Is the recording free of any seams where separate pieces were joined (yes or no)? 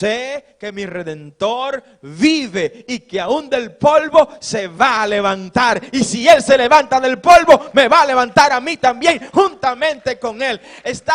yes